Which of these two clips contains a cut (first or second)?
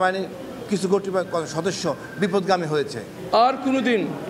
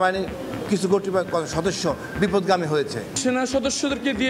second